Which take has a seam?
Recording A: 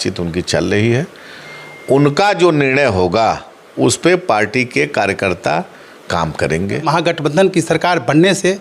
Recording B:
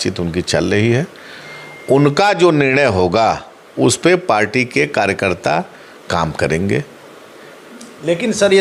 A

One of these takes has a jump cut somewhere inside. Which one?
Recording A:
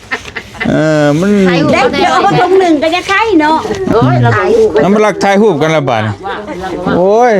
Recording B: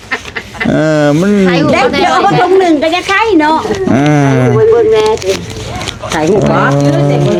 A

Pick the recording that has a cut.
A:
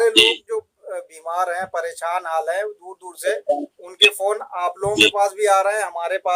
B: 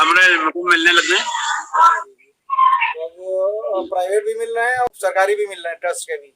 B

